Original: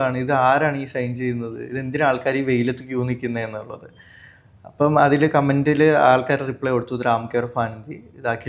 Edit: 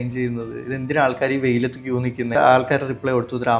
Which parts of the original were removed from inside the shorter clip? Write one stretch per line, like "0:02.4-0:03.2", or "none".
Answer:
0:03.4-0:05.9

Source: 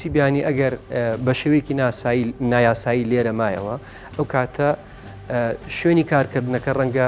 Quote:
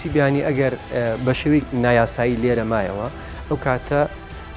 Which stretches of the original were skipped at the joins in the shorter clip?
0:01.7-0:02.4

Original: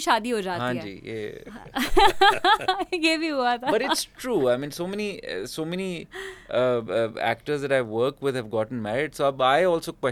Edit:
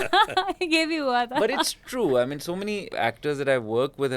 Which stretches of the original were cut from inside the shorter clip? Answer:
0:05.2-0:07.1

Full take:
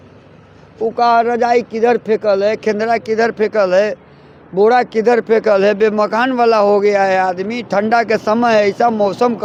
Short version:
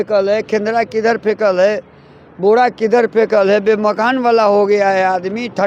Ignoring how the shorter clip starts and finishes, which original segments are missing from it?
none

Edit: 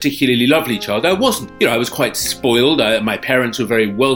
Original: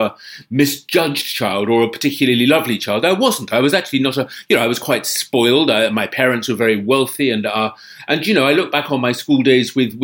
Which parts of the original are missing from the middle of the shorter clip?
0:03.4-0:04.3

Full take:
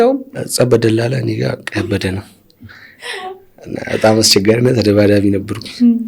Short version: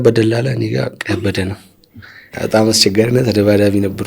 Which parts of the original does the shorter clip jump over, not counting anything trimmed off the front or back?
0:03.0-0:03.8

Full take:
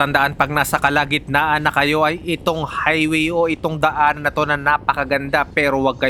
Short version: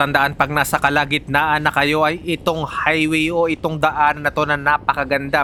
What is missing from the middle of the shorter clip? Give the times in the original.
none

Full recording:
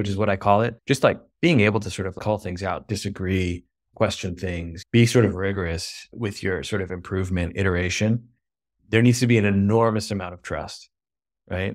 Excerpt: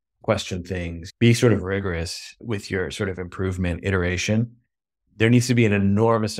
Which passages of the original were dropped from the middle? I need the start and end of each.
none

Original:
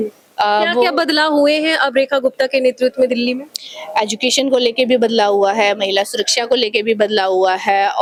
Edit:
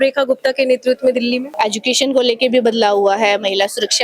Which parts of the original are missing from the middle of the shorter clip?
0:03.4-0:03.8

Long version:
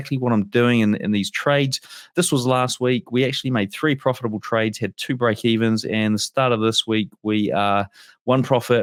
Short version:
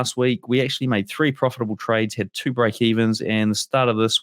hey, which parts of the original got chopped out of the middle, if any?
none

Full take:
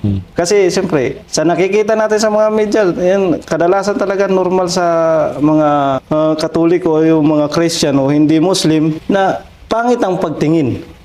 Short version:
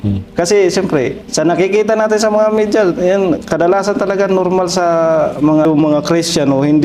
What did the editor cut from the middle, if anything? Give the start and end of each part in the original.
0:05.6-0:07.1

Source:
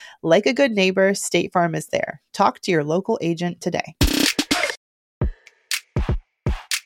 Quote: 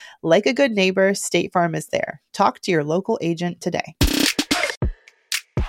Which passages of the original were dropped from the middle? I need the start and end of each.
0:04.8-0:05.2

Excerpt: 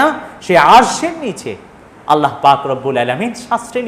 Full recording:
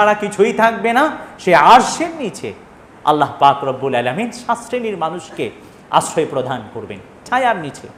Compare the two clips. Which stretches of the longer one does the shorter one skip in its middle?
none

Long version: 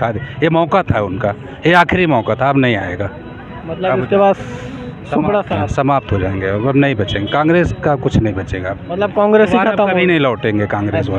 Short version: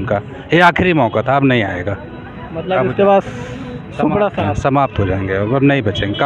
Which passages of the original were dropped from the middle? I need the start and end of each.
none

